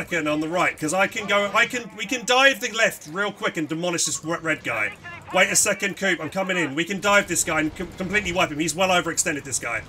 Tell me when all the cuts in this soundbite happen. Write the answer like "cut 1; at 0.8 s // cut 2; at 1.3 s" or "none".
none